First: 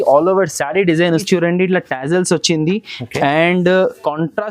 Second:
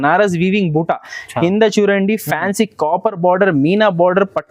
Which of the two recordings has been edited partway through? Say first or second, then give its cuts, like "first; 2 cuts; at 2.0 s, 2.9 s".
first; 1 cut; at 1.2 s